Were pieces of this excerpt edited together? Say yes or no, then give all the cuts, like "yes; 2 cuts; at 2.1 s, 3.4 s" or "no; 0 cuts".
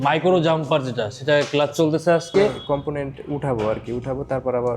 yes; 1 cut; at 2.6 s